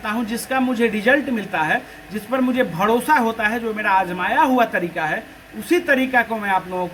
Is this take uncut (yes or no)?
yes